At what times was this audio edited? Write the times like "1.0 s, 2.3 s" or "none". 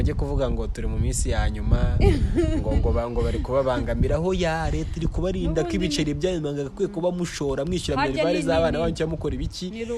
none